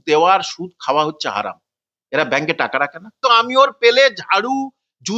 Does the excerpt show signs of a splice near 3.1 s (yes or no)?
yes